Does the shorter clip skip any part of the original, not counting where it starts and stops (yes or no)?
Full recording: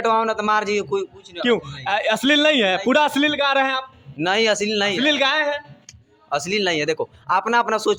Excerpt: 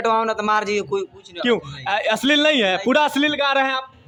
no